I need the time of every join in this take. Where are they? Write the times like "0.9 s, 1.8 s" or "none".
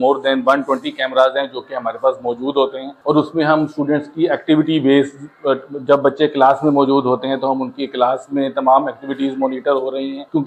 none